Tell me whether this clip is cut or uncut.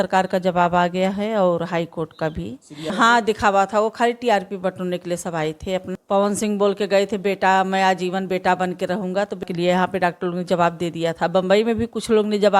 cut